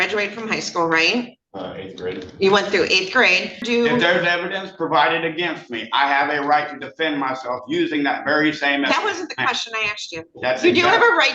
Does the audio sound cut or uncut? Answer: cut